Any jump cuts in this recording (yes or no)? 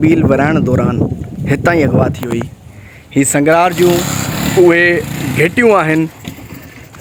no